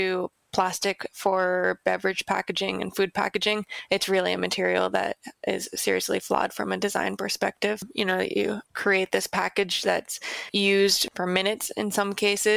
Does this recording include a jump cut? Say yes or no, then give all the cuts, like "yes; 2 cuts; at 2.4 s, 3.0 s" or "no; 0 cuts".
no; 0 cuts